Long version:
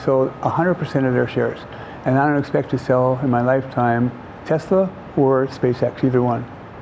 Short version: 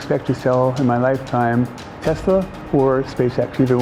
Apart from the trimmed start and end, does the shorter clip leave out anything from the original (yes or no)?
no